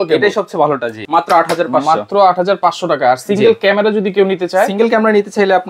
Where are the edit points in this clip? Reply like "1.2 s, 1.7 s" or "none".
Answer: 1.0 s